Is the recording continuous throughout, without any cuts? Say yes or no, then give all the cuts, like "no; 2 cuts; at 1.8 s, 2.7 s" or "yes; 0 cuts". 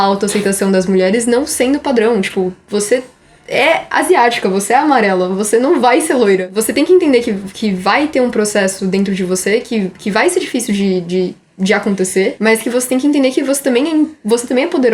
no; 2 cuts; at 6.5 s, 12.4 s